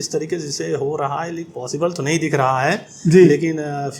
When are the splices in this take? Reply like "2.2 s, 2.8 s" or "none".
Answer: none